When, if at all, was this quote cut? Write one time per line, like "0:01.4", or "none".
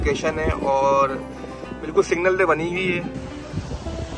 0:03.1